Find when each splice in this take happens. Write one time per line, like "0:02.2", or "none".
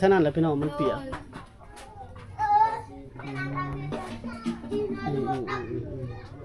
none